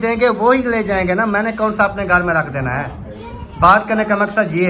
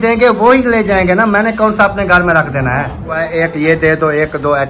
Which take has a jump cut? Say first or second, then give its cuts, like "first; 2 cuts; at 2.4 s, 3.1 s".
second; 1 cut; at 3.3 s